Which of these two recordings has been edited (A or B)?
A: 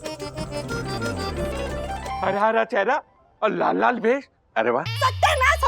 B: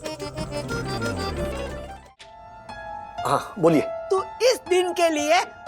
B